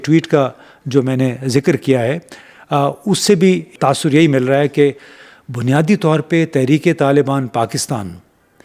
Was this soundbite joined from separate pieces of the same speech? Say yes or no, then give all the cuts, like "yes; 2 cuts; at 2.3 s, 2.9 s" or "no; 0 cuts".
yes; 1 cut; at 3.7 s